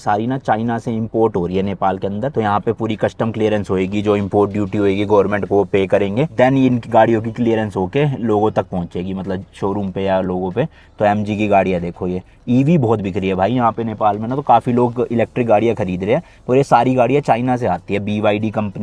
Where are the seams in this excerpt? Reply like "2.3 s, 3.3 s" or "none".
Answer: none